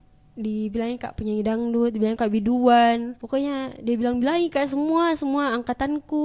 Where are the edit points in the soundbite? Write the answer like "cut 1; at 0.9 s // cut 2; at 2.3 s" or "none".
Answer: cut 1; at 3.1 s